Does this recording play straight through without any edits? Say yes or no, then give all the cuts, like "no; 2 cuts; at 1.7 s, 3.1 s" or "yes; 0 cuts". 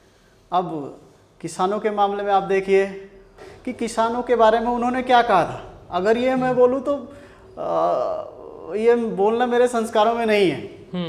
no; 1 cut; at 3.4 s